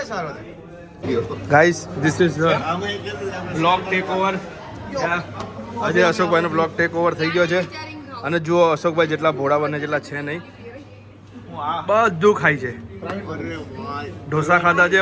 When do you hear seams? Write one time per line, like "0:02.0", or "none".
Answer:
0:01.0